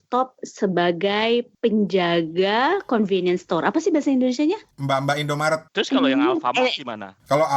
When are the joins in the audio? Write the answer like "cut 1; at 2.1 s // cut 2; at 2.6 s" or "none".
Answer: cut 1; at 1.5 s // cut 2; at 5.7 s